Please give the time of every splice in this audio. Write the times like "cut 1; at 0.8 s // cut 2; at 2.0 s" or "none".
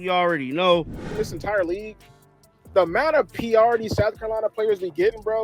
cut 1; at 1.0 s

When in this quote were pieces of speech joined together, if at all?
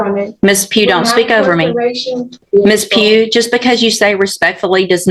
cut 1; at 2.4 s

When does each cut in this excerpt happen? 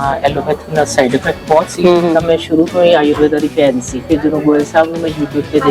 cut 1; at 4.0 s

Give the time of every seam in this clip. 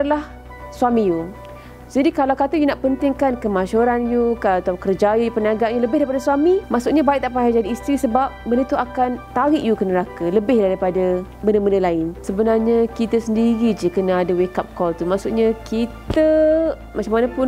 cut 1; at 6.7 s // cut 2; at 9.2 s // cut 3; at 11.3 s // cut 4; at 12.2 s

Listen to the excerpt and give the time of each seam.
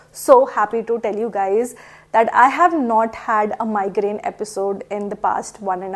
none

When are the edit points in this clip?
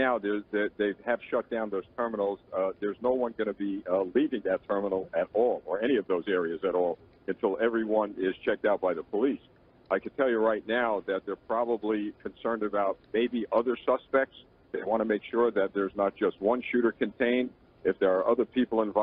none

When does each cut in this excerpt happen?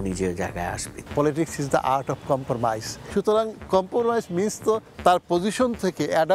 cut 1; at 1.0 s // cut 2; at 2.9 s

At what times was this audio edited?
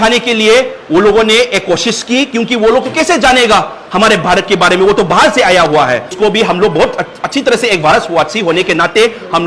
none

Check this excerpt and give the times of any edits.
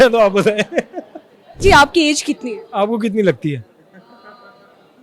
cut 1; at 1.6 s

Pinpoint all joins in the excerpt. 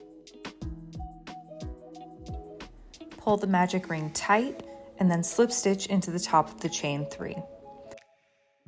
cut 1; at 2.6 s // cut 2; at 7.4 s

